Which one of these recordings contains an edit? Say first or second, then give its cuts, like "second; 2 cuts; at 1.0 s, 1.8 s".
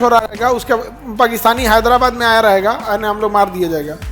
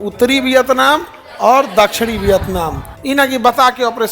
second; 1 cut; at 2.9 s